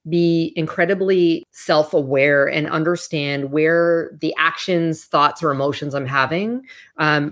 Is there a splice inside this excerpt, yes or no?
yes